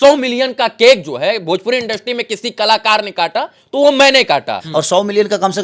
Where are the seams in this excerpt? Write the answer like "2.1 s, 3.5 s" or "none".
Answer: 4.6 s